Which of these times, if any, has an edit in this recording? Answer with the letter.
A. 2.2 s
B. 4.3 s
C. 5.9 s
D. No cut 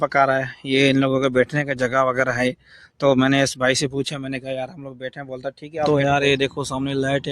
C